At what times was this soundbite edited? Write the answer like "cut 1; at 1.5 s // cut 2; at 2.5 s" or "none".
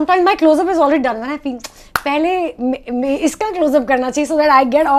none